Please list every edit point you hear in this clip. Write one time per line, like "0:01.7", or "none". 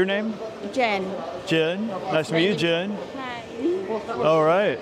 none